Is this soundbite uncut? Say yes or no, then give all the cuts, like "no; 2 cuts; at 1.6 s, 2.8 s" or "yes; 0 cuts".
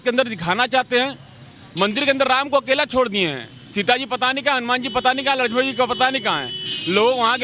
yes; 0 cuts